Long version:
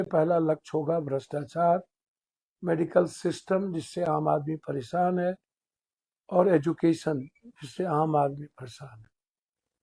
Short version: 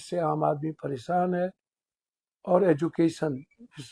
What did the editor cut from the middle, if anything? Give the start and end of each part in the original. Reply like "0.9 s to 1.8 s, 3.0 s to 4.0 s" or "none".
none